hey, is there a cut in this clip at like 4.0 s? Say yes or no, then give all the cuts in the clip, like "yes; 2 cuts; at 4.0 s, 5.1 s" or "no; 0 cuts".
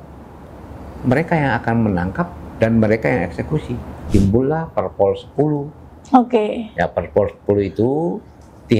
yes; 1 cut; at 4.0 s